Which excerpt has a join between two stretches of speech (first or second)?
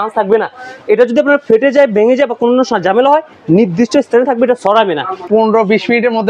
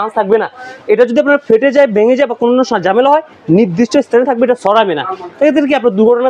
first